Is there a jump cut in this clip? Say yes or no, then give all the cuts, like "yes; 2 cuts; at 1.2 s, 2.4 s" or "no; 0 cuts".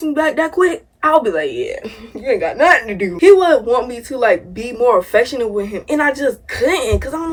no; 0 cuts